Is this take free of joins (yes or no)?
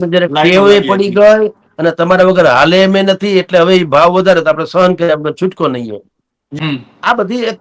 yes